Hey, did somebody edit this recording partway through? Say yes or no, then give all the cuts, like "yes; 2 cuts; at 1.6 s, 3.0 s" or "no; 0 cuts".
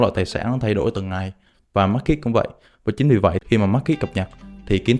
no; 0 cuts